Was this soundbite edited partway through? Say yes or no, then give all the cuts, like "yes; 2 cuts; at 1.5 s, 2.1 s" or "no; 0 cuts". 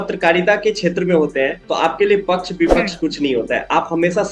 no; 0 cuts